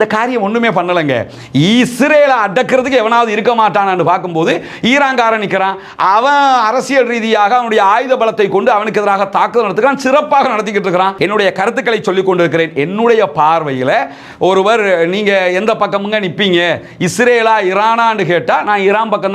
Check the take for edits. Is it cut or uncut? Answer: cut